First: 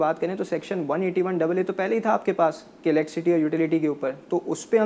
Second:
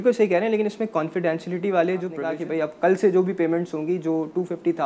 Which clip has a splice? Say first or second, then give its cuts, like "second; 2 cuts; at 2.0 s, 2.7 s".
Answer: second; 1 cut; at 2.2 s